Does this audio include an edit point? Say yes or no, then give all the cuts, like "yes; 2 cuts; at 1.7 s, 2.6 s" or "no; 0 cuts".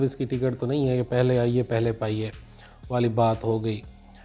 no; 0 cuts